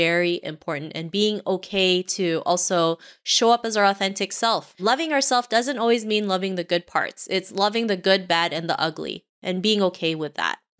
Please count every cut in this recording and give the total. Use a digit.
1